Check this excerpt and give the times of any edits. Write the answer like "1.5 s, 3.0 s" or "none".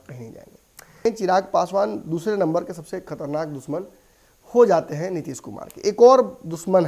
1.0 s